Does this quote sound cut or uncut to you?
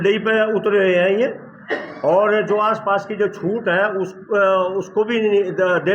uncut